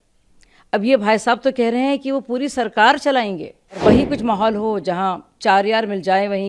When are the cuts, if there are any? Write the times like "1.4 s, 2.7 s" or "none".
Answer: 3.8 s